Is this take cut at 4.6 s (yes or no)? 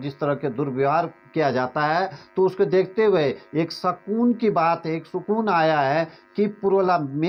no